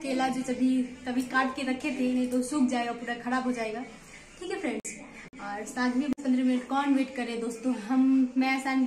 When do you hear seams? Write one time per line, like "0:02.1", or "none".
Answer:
0:06.1